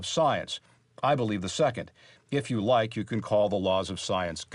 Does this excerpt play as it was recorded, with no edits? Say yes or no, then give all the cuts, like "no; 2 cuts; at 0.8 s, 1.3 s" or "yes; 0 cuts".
yes; 0 cuts